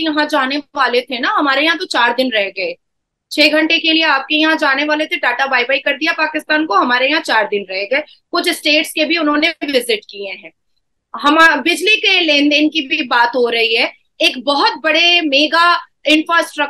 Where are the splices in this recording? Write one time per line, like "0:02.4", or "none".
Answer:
none